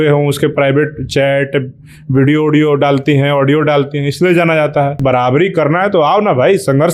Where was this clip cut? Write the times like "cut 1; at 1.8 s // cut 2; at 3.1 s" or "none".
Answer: cut 1; at 5.0 s